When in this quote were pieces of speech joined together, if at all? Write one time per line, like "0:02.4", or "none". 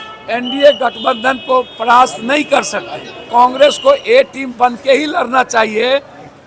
0:03.3